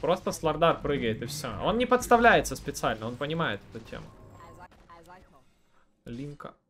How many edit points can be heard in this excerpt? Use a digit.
1